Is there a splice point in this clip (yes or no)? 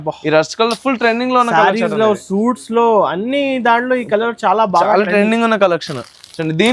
no